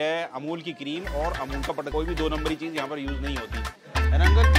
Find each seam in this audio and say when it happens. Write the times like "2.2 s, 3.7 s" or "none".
1.9 s

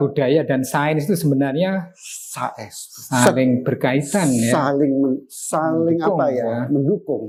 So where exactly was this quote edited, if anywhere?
none

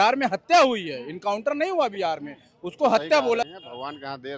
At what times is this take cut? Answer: 3.5 s

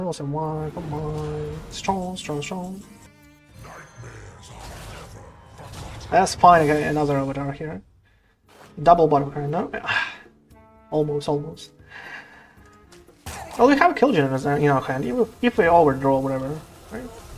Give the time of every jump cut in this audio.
3.1 s, 13.3 s

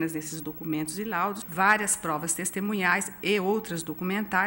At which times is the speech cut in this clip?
1.4 s

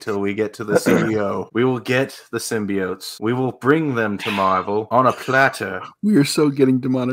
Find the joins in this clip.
1.5 s, 3.1 s, 4.9 s

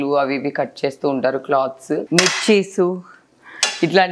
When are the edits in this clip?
2.1 s

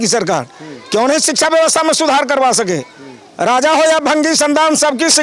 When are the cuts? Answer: none

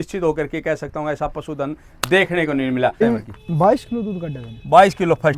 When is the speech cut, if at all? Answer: 3.0 s

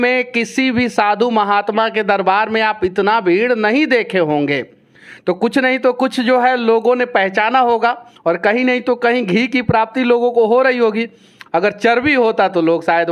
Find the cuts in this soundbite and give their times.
none

